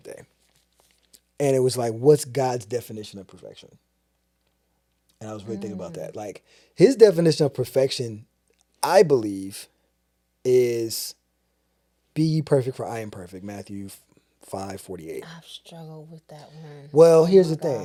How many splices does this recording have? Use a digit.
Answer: 0